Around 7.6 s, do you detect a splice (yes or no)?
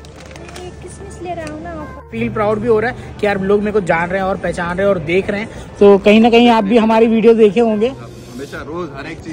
no